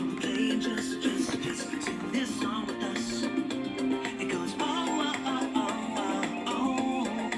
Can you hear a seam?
yes; 1 cut; at 4.6 s

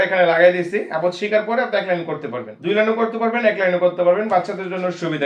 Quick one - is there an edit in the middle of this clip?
no; 0 cuts

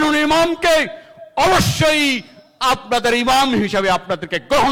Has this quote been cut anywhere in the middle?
no; 0 cuts

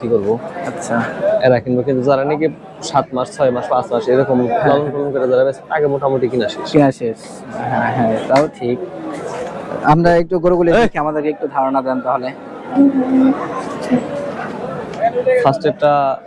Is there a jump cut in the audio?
no; 0 cuts

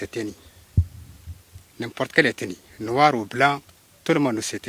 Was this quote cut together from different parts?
no; 0 cuts

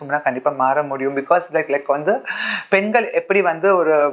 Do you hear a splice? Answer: no; 0 cuts

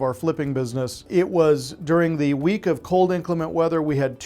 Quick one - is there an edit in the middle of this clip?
yes; 1 cut; at 1.1 s

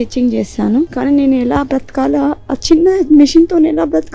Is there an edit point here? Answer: yes; 1 cut; at 0.9 s

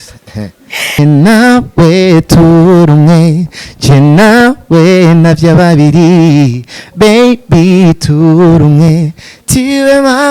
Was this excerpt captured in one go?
no; 1 cut; at 0.9 s

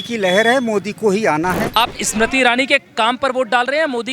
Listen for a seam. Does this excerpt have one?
yes; 1 cut; at 1.8 s

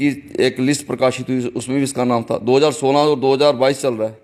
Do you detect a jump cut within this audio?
no; 0 cuts

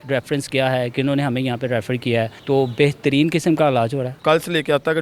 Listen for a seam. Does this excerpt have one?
yes; 2 cuts; at 2.4 s, 4.2 s

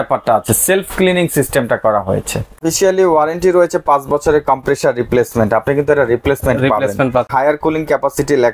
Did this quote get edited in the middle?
yes; 2 cuts; at 2.6 s, 7.3 s

